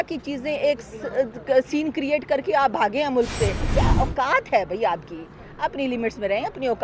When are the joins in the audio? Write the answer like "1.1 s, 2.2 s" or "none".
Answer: 3.6 s